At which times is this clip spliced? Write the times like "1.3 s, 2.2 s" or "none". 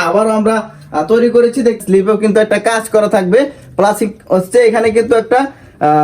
1.8 s